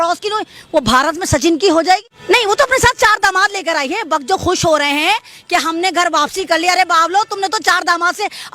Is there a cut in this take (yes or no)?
yes